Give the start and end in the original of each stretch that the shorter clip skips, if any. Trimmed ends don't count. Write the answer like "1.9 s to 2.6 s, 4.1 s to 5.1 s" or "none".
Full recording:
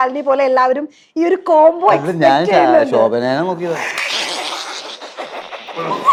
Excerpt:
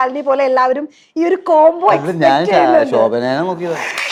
none